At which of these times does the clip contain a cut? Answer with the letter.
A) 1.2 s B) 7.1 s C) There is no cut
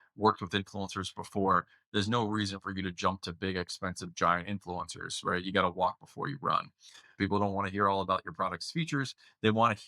B